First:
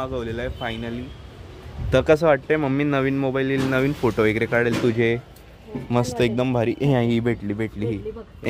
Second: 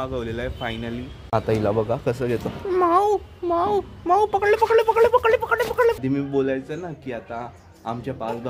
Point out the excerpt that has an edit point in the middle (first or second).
second